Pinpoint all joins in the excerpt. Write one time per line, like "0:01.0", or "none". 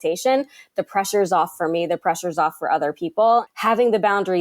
0:03.5